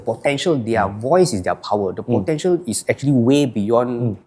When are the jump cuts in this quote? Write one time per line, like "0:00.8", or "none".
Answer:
none